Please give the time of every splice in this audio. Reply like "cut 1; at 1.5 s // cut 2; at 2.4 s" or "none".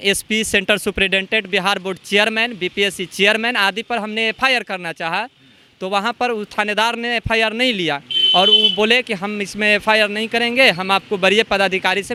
none